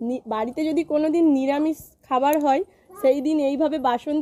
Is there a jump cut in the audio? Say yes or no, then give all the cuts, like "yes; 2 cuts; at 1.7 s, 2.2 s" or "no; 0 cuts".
no; 0 cuts